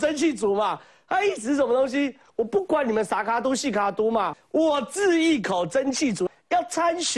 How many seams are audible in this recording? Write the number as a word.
two